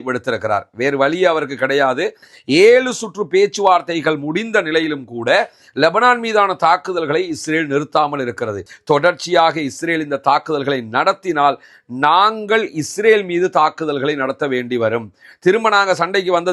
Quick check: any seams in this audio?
yes; 2 cuts; at 2.3 s, 8.7 s

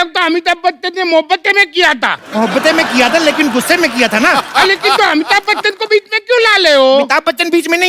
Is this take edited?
no; 0 cuts

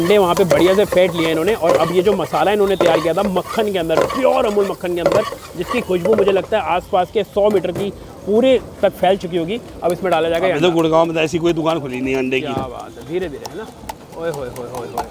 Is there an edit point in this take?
no; 0 cuts

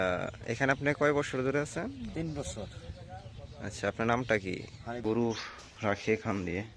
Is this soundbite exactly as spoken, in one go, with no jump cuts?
no; 1 cut; at 5.0 s

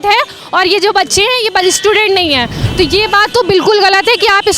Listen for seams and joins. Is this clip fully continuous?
no; 1 cut; at 2.6 s

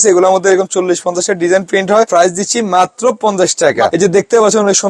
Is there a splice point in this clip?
yes; 2 cuts; at 2.1 s, 3.9 s

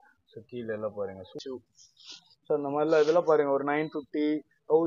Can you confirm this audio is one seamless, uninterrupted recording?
no; 1 cut; at 1.4 s

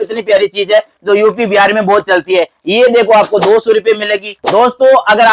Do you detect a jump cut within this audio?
yes; 1 cut; at 4.3 s

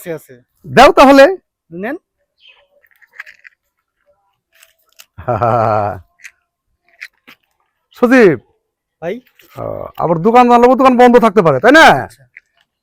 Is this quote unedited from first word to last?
yes; 0 cuts

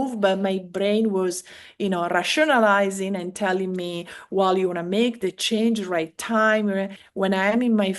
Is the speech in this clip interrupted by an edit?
yes; 1 cut; at 7.0 s

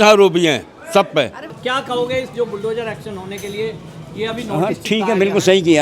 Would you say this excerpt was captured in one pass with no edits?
yes; 0 cuts

